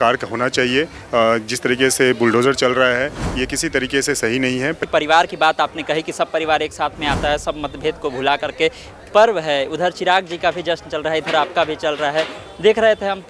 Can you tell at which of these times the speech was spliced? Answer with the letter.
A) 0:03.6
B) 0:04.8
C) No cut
B